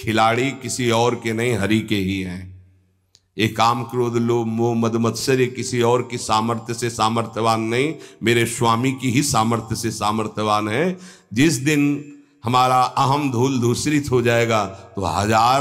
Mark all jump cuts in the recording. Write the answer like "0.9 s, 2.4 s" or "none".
none

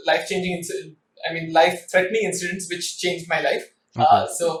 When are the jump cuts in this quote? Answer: none

